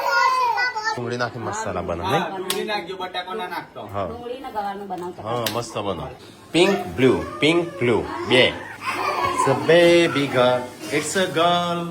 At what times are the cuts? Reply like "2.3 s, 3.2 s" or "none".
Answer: 1.0 s